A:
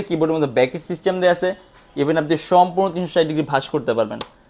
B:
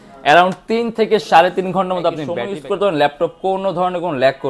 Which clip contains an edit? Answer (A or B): B